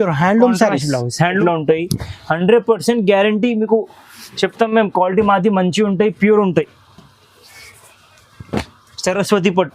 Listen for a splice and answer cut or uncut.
cut